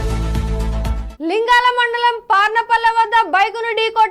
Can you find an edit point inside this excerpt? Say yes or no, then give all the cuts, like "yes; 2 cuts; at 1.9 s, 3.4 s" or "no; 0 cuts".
yes; 1 cut; at 1.0 s